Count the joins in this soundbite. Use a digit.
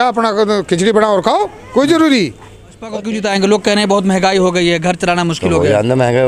1